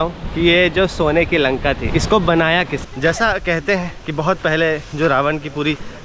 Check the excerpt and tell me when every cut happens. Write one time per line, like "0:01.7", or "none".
0:02.8